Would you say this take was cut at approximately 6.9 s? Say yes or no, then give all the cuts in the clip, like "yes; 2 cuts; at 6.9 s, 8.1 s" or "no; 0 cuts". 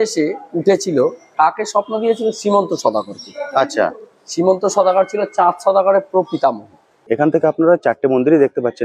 yes; 1 cut; at 6.9 s